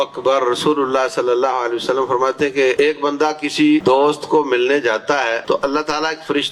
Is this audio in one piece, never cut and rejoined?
no; 3 cuts; at 2.7 s, 3.8 s, 5.4 s

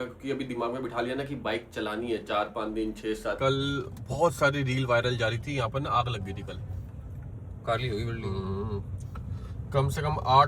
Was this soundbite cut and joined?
yes; 2 cuts; at 3.4 s, 7.3 s

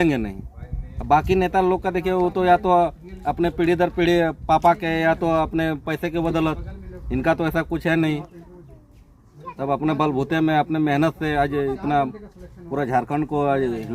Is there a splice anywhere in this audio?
no; 0 cuts

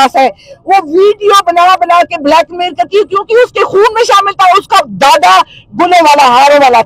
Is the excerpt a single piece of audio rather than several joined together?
yes; 0 cuts

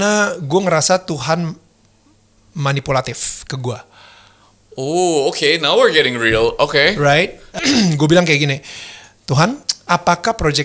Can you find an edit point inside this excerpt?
yes; 2 cuts; at 7.6 s, 9.7 s

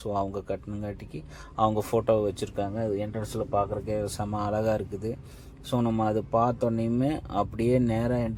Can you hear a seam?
no; 0 cuts

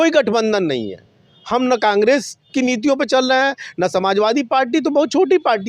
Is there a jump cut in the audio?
no; 0 cuts

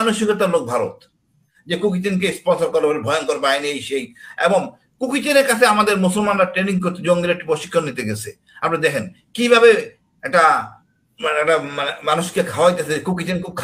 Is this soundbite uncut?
no; 1 cut; at 1.5 s

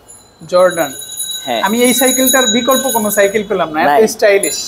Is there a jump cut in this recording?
no; 0 cuts

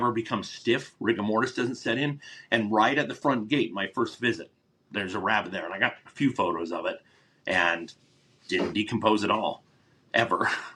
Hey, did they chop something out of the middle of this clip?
no; 0 cuts

